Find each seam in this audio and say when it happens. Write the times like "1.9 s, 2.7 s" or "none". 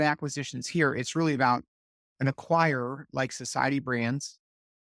none